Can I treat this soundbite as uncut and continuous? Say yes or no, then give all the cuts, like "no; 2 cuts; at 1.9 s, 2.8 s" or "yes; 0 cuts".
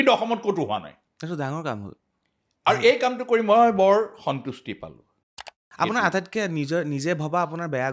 no; 2 cuts; at 1.0 s, 5.6 s